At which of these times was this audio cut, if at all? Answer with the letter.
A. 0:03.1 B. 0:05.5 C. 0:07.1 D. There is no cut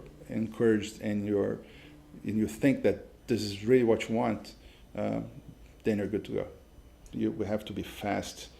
C